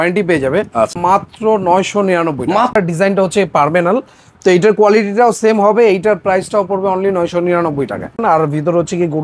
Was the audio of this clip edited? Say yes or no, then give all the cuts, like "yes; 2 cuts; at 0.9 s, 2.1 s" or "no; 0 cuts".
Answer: yes; 3 cuts; at 0.9 s, 2.8 s, 8.2 s